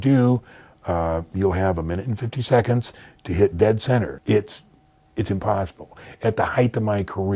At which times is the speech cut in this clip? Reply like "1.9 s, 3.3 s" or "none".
4.2 s